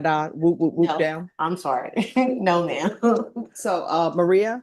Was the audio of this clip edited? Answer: no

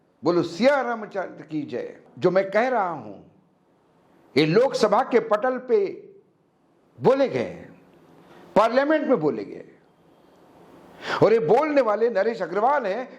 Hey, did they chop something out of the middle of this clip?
yes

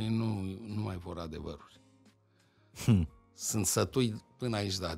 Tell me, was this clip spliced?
no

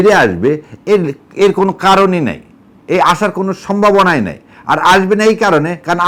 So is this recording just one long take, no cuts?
yes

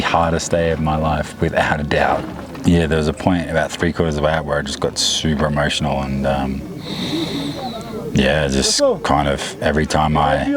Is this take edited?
yes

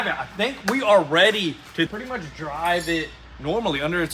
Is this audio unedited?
no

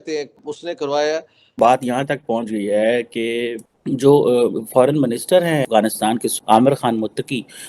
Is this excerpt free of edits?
no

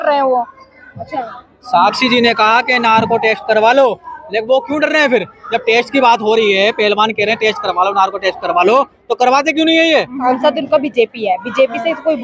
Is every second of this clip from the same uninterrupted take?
no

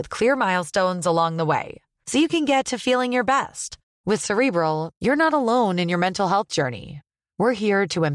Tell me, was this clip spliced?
no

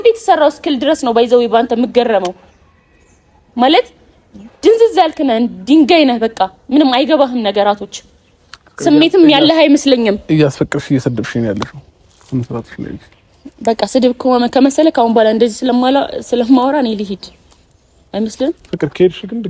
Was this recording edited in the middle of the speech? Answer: no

